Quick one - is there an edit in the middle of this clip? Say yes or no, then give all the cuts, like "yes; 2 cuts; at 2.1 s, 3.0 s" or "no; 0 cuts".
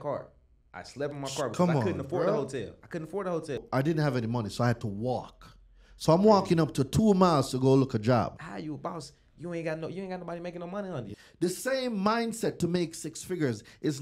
yes; 3 cuts; at 3.6 s, 8.5 s, 11.2 s